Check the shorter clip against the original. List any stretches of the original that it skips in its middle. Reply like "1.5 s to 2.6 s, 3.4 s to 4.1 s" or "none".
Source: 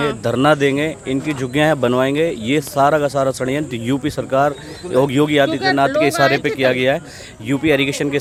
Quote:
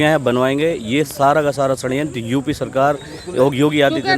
none